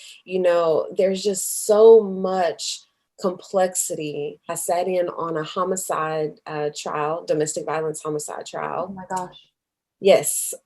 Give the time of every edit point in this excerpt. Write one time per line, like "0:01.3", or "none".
0:04.5